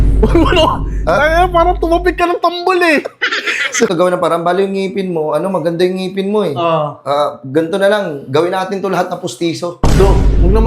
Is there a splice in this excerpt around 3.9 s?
yes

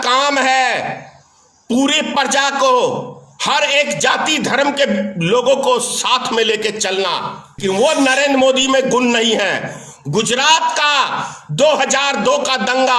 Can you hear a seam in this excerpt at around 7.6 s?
yes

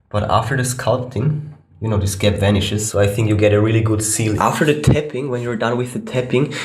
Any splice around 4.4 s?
yes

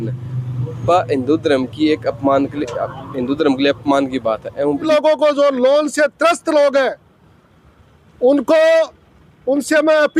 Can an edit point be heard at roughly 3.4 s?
no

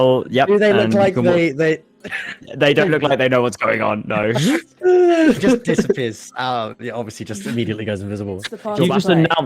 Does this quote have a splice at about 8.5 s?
yes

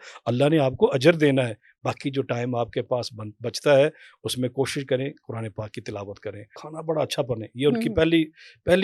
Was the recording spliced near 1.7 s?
no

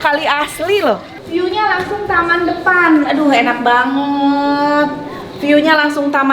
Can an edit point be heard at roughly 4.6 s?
no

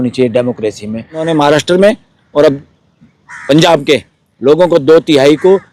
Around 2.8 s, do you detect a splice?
no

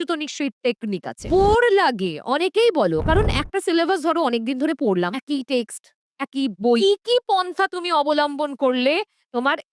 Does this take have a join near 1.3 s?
yes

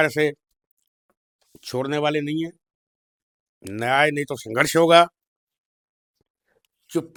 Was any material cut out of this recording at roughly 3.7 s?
no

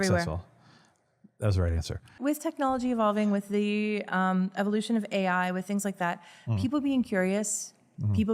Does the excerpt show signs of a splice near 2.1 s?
yes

